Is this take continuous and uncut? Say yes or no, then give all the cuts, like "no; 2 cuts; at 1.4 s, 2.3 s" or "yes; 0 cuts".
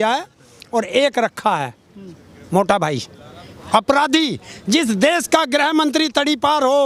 yes; 0 cuts